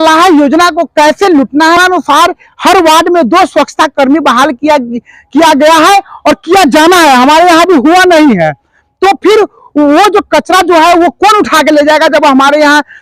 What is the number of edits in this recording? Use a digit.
1